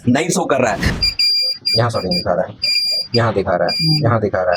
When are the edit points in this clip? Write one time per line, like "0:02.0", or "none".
0:00.9